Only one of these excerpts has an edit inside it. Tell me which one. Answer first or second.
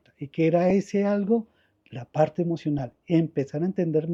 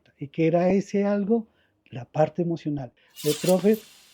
second